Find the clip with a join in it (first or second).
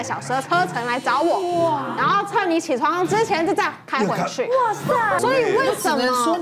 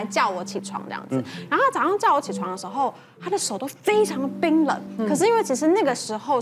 first